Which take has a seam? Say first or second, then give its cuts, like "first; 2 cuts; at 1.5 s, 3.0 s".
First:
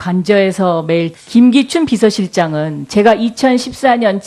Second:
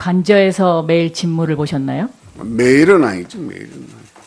second; 1 cut; at 1.2 s